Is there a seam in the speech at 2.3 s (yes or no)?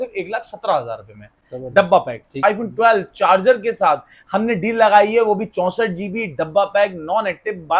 yes